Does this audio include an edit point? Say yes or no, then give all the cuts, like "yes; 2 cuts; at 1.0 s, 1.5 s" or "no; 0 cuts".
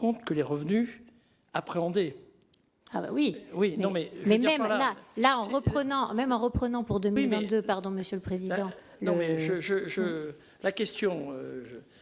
no; 0 cuts